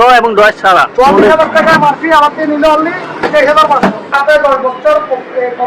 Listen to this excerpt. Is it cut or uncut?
cut